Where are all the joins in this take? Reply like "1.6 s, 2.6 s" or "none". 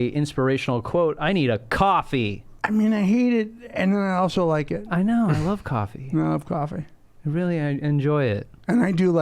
2.5 s

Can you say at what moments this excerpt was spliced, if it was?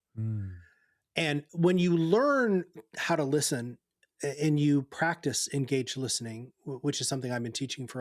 1.5 s

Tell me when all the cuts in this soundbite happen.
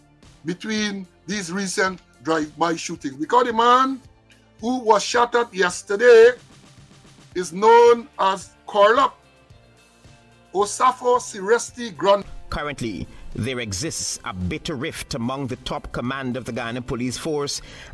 12.2 s

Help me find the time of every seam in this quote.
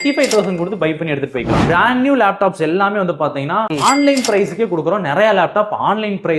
1.6 s, 3.7 s

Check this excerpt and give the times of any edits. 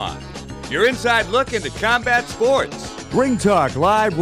3.0 s

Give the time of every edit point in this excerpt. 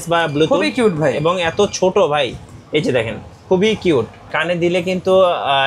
4.3 s

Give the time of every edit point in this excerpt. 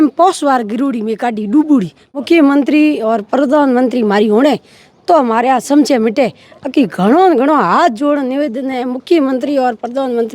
2.2 s

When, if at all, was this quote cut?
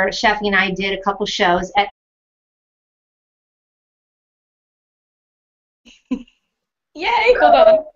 none

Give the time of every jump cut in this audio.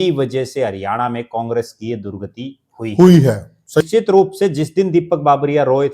3.8 s

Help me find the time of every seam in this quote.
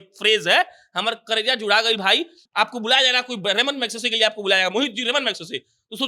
2.4 s

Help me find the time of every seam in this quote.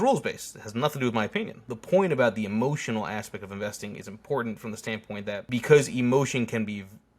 1.7 s, 5.4 s

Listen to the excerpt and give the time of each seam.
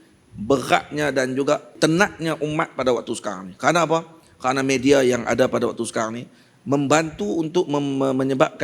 1.7 s

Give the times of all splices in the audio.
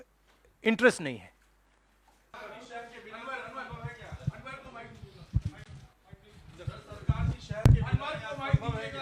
none

